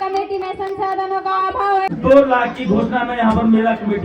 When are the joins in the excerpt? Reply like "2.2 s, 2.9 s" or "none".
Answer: 1.9 s